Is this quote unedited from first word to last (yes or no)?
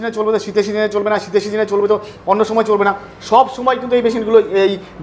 yes